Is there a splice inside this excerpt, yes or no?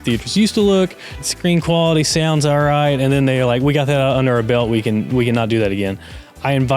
yes